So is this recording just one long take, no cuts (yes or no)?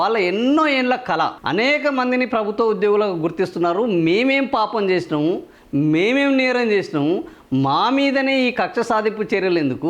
yes